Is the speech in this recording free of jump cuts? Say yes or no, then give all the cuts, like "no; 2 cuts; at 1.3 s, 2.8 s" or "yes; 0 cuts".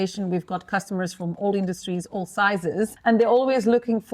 no; 1 cut; at 3.0 s